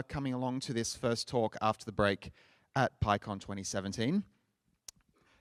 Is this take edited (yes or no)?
no